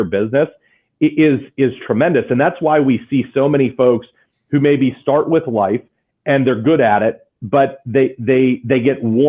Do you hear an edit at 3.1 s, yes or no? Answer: no